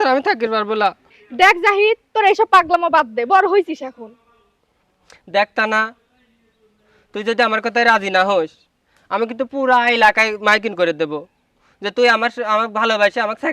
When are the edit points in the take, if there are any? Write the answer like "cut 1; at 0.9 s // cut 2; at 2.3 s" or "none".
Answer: none